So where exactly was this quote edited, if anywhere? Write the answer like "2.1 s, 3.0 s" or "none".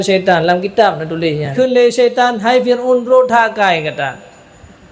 1.5 s